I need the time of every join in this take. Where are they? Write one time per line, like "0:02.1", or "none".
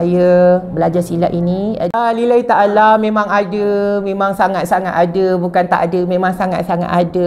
0:01.9